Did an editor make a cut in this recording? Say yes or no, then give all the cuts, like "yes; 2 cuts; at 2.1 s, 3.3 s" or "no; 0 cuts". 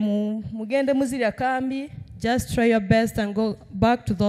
no; 0 cuts